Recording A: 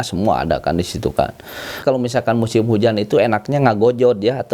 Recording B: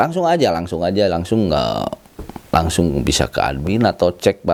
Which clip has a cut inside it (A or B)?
A